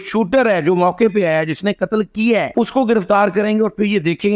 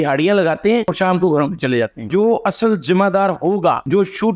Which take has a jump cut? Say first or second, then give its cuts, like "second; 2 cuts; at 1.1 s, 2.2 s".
second; 1 cut; at 2.1 s